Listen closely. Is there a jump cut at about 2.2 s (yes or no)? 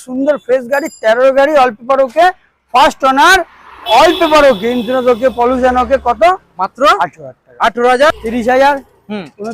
no